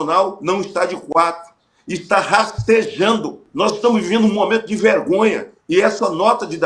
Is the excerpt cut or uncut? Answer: cut